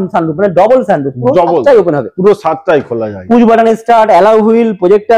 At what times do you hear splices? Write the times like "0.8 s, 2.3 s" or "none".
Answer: none